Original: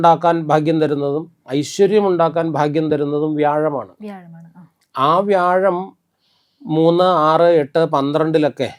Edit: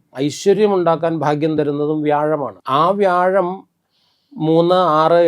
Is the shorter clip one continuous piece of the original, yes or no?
no